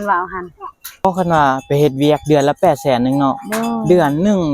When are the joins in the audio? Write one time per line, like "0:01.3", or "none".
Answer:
0:01.0